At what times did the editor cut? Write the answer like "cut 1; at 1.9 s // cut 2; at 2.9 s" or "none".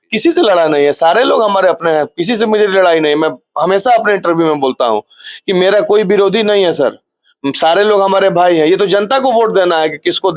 none